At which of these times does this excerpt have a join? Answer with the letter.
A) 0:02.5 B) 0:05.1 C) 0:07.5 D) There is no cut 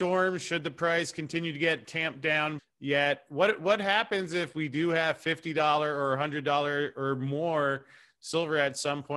A